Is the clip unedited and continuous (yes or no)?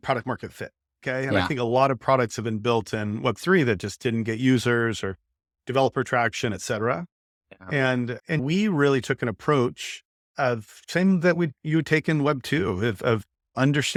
yes